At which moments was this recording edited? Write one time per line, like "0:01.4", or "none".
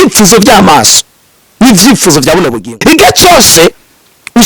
0:02.8